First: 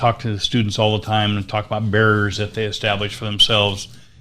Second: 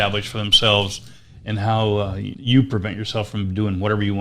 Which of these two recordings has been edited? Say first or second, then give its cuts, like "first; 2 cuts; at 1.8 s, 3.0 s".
second; 1 cut; at 2.3 s